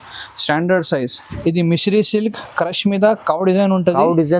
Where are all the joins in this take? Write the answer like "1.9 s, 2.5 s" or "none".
1.3 s